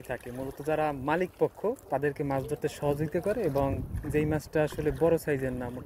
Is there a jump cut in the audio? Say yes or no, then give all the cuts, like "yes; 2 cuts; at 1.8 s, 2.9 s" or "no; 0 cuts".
yes; 1 cut; at 1.8 s